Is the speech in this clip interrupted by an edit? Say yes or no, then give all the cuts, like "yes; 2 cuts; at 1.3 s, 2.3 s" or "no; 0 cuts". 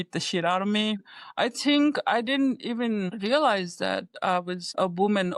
no; 0 cuts